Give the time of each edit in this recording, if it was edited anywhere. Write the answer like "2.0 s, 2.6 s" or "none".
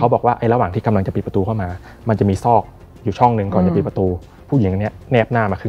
4.3 s